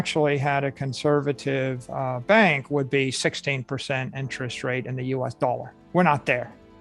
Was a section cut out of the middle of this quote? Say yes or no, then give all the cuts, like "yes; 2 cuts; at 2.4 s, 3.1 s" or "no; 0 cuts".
yes; 1 cut; at 5.7 s